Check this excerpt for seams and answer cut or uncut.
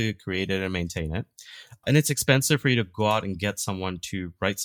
cut